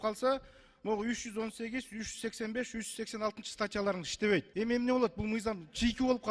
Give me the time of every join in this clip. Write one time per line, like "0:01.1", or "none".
0:04.5